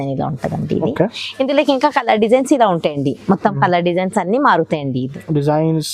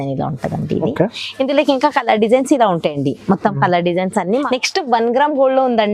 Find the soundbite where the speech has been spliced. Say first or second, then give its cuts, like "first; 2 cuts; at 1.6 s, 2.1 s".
second; 1 cut; at 4.4 s